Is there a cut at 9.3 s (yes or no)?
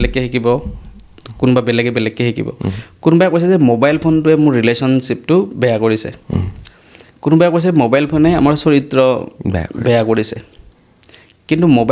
no